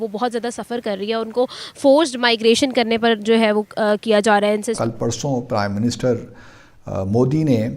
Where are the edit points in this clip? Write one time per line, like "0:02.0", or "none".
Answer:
0:04.8